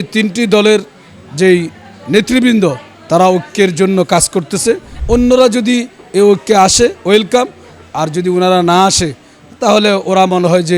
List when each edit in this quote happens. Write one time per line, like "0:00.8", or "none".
0:04.9

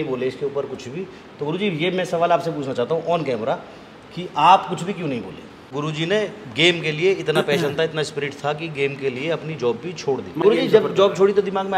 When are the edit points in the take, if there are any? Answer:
0:05.6
0:10.4

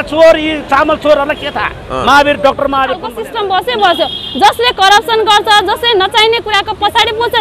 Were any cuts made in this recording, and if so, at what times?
0:03.2

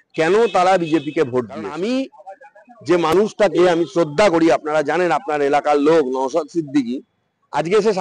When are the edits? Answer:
0:01.7

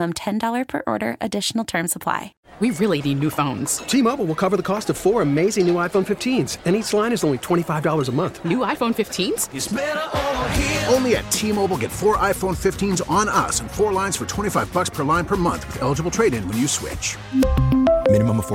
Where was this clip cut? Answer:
0:02.4

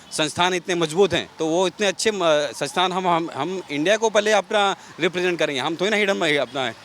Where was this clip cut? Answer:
0:01.3

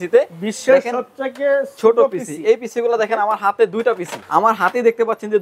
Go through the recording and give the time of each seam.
none

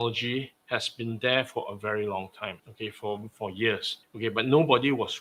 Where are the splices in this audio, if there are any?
none

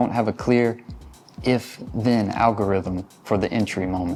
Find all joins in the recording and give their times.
none

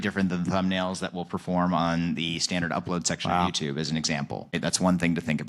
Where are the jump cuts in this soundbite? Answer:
0:04.5

